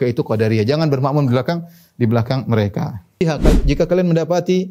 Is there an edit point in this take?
yes; 1 cut; at 3.2 s

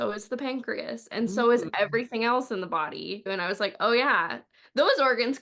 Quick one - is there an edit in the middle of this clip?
yes; 2 cuts; at 3.3 s, 4.5 s

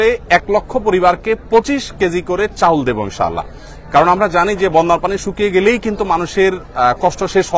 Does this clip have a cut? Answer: no; 0 cuts

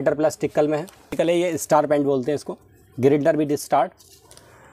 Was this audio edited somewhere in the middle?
yes; 1 cut; at 1.1 s

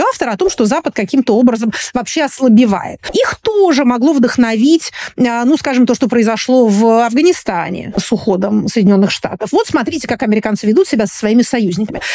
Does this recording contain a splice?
yes; 2 cuts; at 3.0 s, 8.0 s

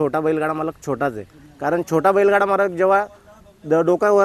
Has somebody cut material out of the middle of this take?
no; 0 cuts

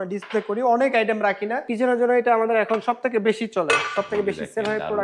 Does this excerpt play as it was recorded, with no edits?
no; 1 cut; at 1.7 s

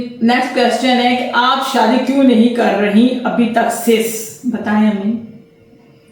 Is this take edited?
no; 0 cuts

